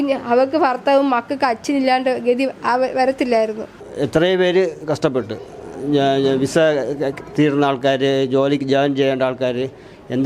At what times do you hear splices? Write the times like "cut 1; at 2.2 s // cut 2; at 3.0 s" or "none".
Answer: cut 1; at 3.8 s